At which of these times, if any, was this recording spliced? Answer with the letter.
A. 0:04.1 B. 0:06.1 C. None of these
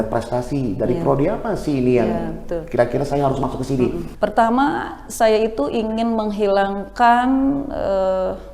A